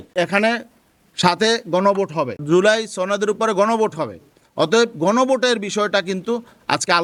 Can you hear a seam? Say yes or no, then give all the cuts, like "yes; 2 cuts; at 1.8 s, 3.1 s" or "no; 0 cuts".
no; 0 cuts